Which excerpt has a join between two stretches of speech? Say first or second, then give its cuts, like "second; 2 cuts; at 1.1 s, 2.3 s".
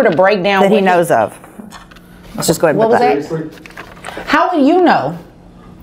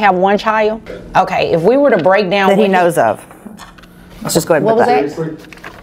second; 1 cut; at 0.9 s